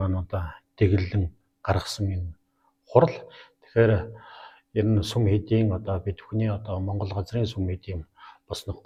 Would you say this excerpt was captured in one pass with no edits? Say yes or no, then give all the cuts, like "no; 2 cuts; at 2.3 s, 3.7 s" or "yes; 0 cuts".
yes; 0 cuts